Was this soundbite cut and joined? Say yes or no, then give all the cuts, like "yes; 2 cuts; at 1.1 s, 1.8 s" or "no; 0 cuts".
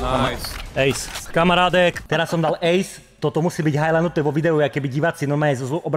yes; 2 cuts; at 1.1 s, 2.0 s